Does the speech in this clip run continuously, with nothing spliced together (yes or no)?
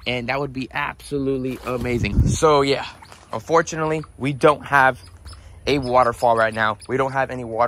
no